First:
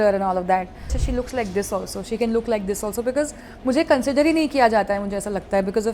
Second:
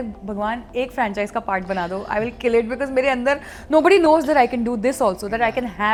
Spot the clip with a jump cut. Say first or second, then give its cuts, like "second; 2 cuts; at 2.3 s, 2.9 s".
first; 1 cut; at 1.0 s